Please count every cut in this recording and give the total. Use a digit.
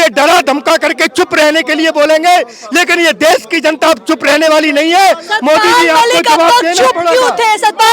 0